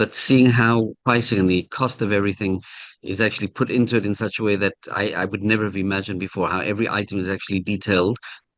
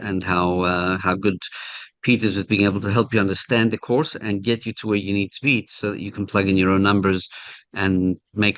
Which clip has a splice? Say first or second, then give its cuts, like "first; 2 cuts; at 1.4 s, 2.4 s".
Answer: first; 1 cut; at 1.0 s